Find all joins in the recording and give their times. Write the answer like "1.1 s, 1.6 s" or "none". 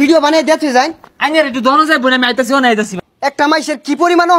2.9 s